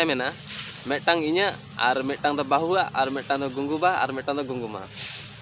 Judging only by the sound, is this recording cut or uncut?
uncut